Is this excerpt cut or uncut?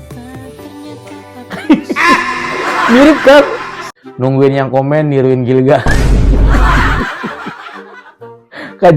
cut